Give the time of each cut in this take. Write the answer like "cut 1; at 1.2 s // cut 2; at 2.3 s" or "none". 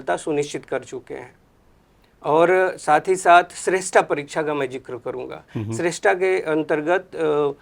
none